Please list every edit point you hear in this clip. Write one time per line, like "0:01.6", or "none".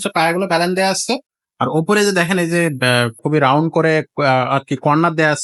none